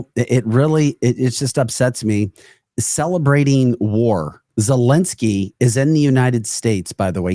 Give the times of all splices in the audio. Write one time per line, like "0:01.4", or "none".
0:04.4